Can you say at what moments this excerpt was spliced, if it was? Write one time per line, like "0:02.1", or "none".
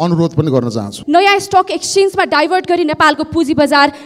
0:00.9

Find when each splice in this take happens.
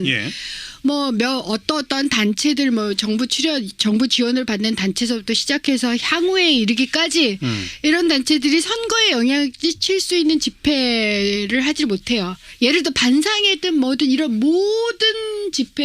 0:04.4

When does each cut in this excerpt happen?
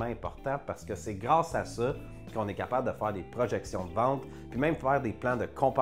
none

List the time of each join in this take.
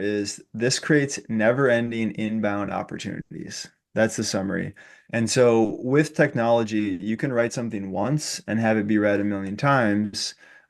none

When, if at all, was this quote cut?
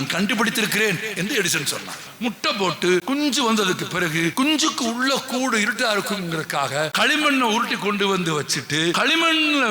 0:02.0
0:03.0
0:04.3
0:06.9
0:09.0

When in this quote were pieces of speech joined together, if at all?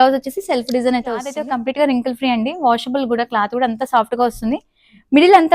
0:01.4

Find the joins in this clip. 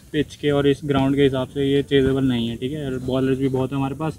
none

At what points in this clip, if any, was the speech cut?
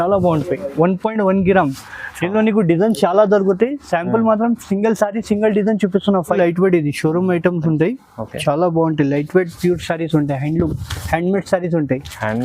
0:06.4

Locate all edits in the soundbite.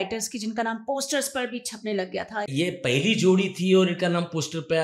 0:02.5

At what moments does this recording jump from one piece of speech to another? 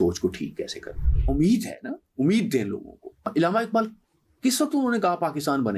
0:01.1
0:03.3

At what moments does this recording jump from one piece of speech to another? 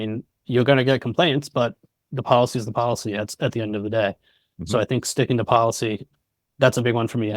0:06.2

